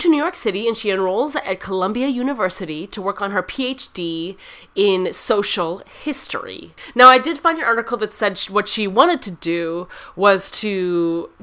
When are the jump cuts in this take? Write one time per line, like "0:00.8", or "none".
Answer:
none